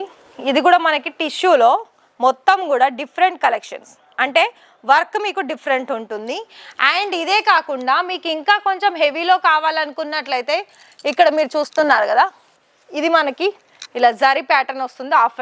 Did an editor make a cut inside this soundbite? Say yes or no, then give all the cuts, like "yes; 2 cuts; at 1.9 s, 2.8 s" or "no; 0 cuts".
no; 0 cuts